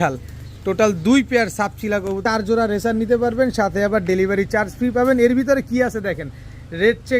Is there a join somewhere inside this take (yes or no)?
yes